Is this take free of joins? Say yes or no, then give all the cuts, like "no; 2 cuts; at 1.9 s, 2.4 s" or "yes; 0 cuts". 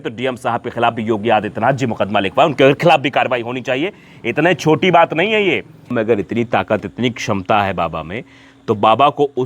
no; 1 cut; at 5.9 s